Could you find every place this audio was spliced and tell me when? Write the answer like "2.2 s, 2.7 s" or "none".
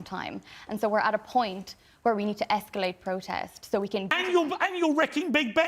4.1 s